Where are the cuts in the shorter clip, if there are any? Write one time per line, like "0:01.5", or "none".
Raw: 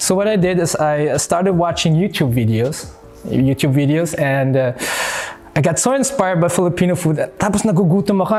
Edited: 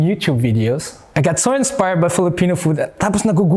0:01.0